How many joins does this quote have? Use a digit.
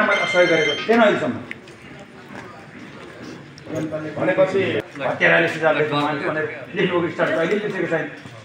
1